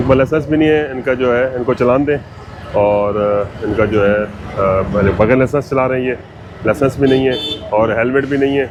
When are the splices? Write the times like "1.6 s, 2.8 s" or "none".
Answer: none